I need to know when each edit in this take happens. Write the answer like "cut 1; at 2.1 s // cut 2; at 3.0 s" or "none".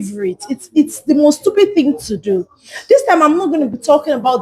none